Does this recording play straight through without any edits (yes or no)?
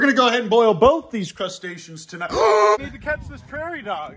no